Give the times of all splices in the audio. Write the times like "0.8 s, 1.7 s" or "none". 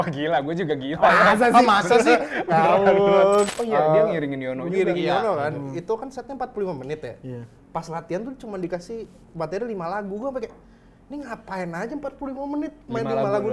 3.5 s